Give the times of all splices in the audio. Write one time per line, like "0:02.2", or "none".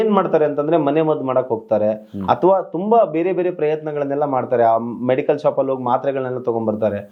none

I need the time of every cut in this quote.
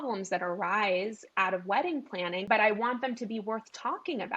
0:02.4

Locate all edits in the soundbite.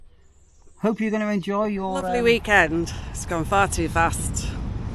0:02.0

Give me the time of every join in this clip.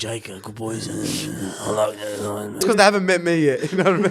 0:02.6

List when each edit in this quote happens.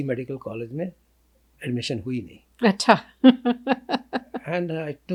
none

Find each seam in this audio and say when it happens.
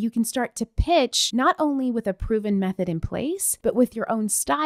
none

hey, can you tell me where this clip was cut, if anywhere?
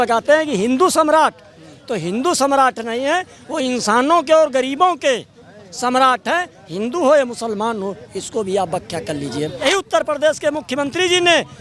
0:09.6

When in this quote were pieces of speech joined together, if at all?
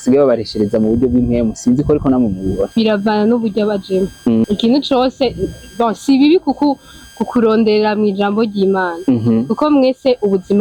0:02.7
0:04.4

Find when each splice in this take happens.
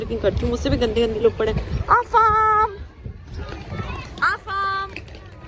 none

